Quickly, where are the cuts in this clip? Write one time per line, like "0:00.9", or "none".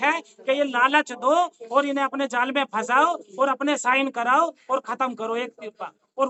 none